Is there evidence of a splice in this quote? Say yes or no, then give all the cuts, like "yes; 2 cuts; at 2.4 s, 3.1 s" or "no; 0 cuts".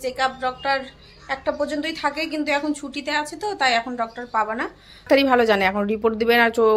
yes; 1 cut; at 5.0 s